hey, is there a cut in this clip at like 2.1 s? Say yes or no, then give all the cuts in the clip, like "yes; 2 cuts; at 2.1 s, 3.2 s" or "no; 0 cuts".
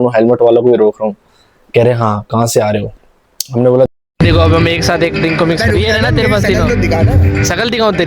no; 1 cut; at 3.9 s